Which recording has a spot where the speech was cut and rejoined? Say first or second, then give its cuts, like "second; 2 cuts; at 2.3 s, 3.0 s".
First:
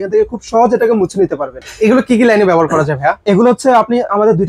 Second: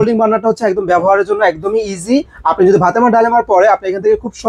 first; 1 cut; at 1.6 s